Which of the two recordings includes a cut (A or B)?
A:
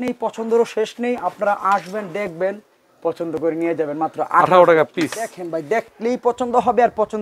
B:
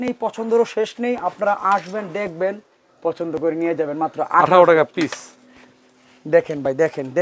A